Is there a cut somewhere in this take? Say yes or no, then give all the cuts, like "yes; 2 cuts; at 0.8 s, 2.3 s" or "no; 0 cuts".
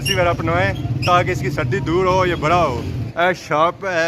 yes; 1 cut; at 3.1 s